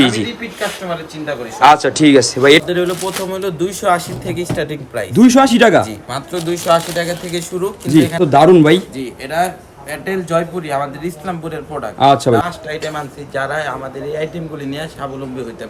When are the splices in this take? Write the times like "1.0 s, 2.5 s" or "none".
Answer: 2.6 s, 8.2 s, 12.4 s